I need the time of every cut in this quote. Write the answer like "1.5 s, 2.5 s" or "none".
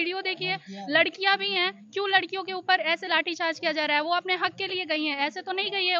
none

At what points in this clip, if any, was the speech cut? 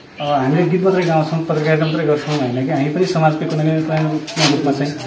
none

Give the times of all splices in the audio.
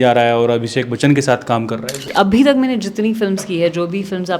2.0 s

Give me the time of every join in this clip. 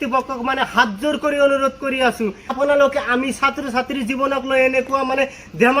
2.5 s

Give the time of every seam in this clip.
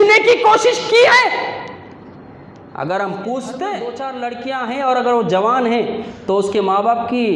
4.0 s

